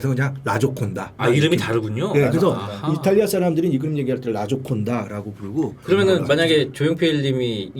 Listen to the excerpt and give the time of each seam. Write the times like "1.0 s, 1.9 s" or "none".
1.1 s